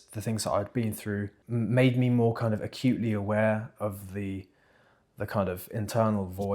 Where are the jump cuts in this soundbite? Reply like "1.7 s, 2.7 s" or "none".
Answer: 1.4 s